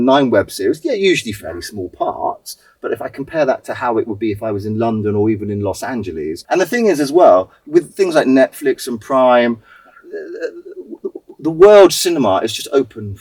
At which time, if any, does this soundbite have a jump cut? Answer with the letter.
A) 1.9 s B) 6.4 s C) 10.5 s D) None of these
B